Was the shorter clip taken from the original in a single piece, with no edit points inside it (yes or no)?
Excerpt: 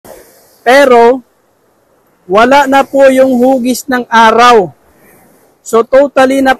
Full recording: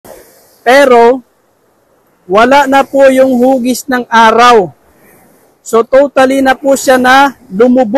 yes